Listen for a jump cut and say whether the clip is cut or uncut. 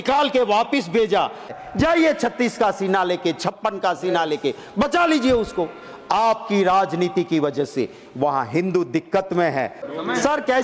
cut